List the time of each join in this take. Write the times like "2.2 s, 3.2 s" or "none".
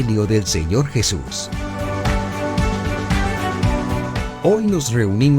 1.3 s, 4.3 s